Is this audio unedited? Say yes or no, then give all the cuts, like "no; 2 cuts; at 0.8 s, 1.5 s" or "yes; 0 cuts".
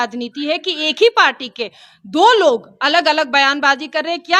yes; 0 cuts